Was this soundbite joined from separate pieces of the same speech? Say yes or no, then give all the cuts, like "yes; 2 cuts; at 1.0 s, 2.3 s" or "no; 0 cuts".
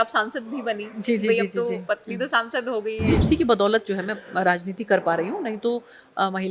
yes; 1 cut; at 3.2 s